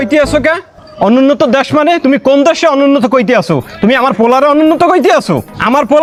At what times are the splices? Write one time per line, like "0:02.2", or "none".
none

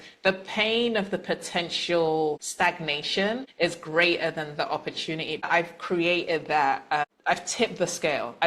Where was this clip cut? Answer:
0:02.5
0:03.5
0:05.4
0:07.1

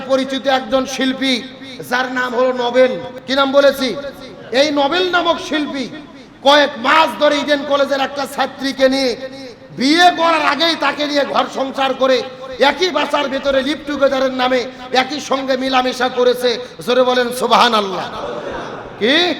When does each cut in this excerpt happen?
none

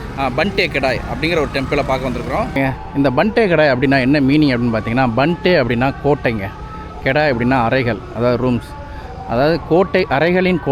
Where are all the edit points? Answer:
0:02.6

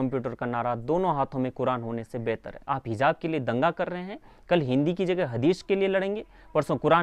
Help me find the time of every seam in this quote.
0:02.5

